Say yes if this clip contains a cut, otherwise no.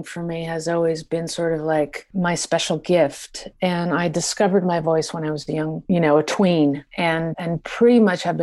yes